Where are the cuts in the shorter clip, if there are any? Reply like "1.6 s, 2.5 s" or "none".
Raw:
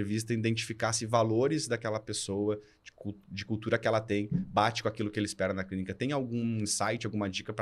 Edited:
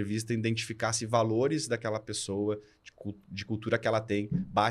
none